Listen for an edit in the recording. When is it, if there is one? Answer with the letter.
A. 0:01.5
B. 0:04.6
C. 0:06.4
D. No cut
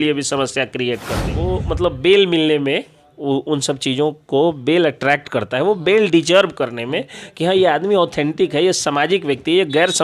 A